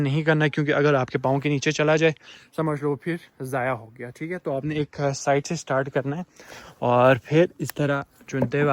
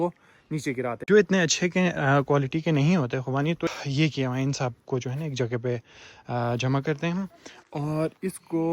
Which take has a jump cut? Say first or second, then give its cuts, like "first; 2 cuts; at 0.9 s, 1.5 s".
second; 2 cuts; at 1.0 s, 3.7 s